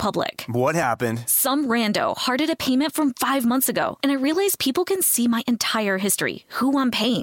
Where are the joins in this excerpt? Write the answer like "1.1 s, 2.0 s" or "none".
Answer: none